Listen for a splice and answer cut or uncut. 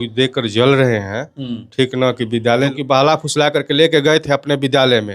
cut